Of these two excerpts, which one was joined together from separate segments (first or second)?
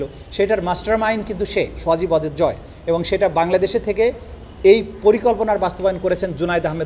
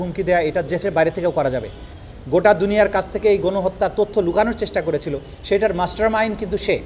second